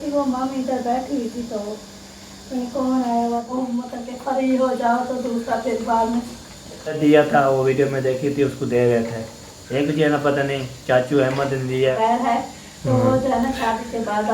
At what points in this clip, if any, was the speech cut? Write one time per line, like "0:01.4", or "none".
0:03.4
0:07.0
0:12.5